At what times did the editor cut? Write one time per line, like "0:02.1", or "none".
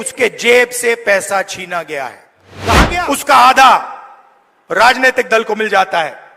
0:02.7